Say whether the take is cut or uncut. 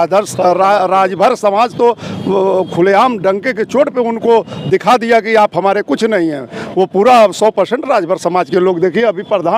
uncut